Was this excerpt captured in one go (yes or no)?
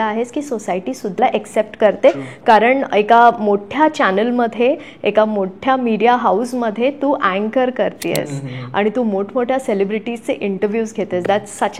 no